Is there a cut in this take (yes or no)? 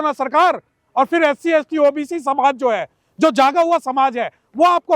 no